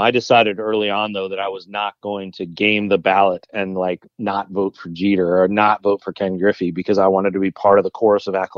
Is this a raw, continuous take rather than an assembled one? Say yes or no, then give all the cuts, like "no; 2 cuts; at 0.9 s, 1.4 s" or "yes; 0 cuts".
yes; 0 cuts